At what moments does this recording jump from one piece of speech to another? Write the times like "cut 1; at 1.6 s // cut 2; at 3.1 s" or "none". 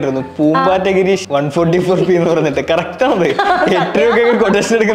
cut 1; at 1.2 s